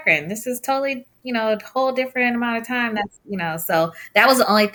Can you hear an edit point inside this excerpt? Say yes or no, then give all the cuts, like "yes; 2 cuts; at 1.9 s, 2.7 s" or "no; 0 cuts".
no; 0 cuts